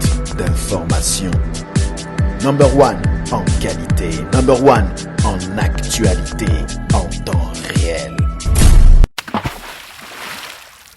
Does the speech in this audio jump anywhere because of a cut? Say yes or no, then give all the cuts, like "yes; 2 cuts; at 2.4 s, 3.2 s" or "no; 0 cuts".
yes; 1 cut; at 9.2 s